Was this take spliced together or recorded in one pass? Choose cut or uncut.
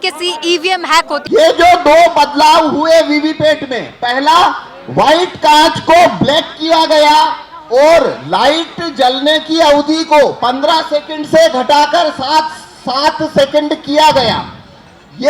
cut